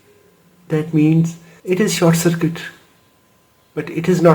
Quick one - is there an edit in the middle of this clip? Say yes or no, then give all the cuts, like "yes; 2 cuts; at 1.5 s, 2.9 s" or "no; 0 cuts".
yes; 1 cut; at 1.5 s